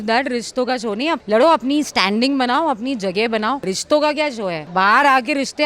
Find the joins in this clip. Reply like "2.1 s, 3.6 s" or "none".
1.2 s, 3.7 s, 4.6 s

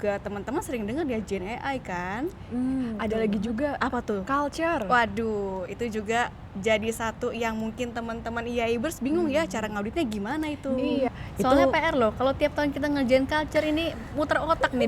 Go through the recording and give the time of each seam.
11.1 s

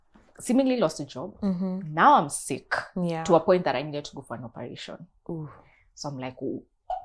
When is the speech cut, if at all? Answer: none

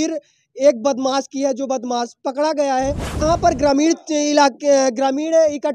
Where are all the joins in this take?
3.2 s

